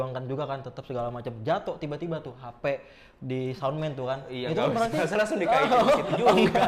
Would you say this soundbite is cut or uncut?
uncut